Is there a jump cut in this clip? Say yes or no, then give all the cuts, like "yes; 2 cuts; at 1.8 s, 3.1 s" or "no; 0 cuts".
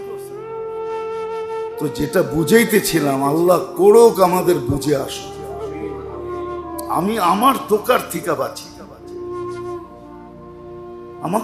yes; 2 cuts; at 5.1 s, 6.9 s